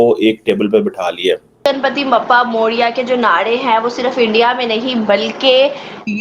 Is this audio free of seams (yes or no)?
no